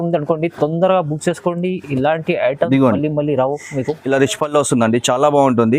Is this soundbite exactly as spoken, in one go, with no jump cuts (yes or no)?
no